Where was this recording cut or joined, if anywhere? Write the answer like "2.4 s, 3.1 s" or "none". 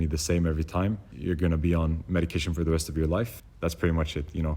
1.1 s, 3.4 s